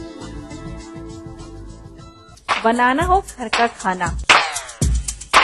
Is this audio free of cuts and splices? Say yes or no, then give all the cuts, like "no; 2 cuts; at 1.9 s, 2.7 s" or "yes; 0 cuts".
no; 1 cut; at 2.3 s